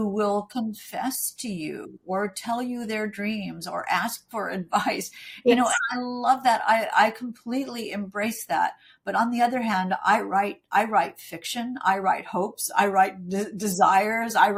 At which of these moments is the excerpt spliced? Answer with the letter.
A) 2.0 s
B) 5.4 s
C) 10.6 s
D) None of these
D